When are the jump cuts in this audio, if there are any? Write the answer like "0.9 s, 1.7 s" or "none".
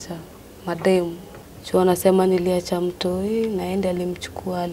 1.3 s

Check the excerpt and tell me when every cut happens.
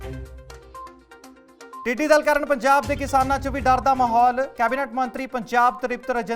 1.0 s, 1.7 s

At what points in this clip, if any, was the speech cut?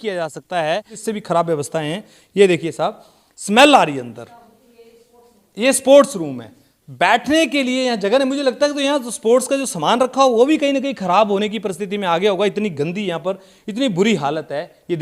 1.0 s

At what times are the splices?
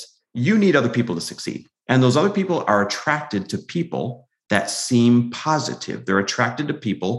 none

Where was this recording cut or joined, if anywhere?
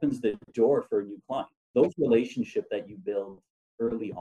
1.6 s

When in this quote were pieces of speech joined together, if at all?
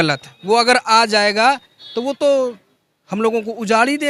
none

